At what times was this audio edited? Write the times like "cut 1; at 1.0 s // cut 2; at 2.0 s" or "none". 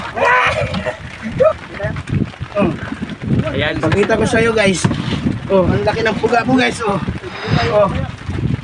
cut 1; at 1.5 s